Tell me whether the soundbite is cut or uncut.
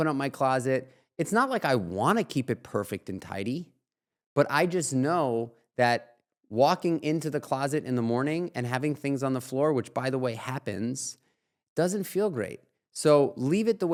uncut